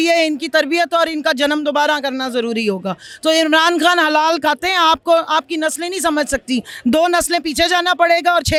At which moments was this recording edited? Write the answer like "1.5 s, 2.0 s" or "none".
none